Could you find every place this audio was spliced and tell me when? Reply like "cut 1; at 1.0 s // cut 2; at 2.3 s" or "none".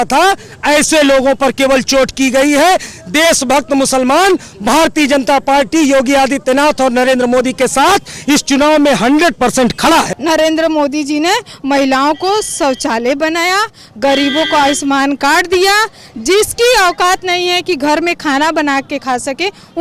cut 1; at 10.1 s